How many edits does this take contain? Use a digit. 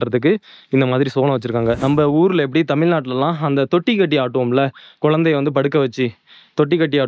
1